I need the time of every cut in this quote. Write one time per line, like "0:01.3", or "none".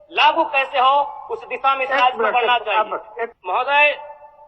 0:03.4

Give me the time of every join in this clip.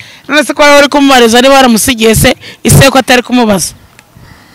none

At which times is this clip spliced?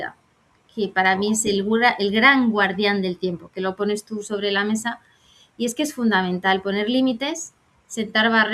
none

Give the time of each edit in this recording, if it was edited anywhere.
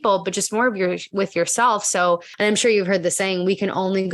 0:02.3

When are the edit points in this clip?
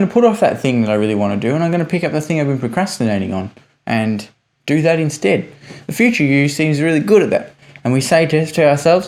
none

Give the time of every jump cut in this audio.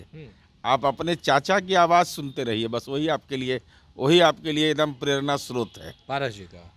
none

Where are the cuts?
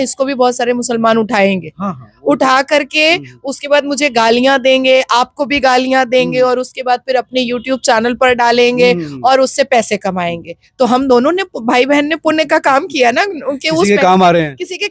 none

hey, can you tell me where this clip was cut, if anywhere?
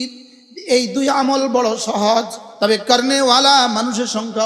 0:02.4

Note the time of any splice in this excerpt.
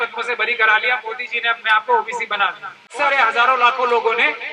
0:02.9

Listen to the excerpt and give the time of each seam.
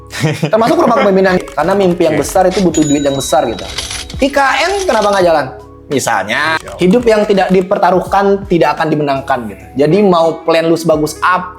0:01.4
0:06.6

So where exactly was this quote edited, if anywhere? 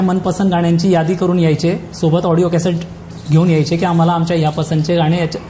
none

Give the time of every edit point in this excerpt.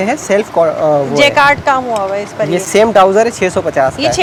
none

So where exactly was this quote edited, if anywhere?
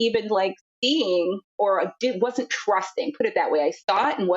0:01.4

